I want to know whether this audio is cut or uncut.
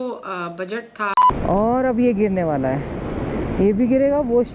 cut